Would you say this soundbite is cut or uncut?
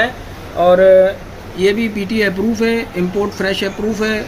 uncut